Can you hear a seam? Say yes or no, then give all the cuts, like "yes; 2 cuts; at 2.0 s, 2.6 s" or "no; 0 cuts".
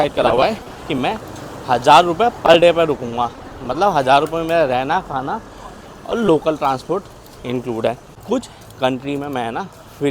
yes; 1 cut; at 8.1 s